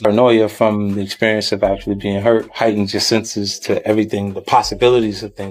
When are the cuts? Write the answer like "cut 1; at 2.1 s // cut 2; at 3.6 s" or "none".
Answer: none